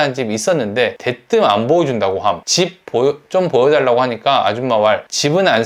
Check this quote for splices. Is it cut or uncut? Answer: uncut